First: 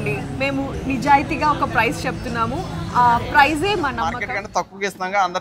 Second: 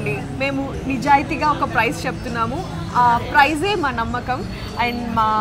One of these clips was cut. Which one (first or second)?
first